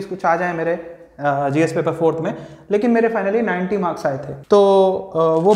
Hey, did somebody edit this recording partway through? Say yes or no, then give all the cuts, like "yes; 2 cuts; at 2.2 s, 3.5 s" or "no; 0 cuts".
no; 0 cuts